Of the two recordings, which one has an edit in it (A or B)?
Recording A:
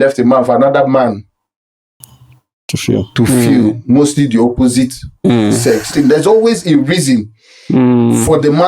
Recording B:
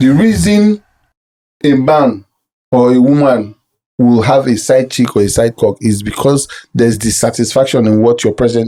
A